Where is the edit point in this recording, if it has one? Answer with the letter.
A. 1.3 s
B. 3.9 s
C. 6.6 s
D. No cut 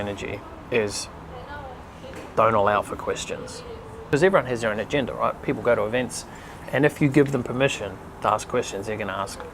B